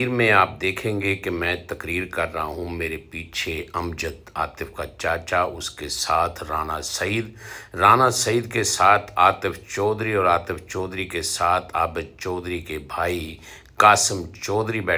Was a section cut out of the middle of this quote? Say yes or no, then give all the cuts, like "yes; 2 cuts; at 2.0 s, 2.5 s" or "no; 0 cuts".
no; 0 cuts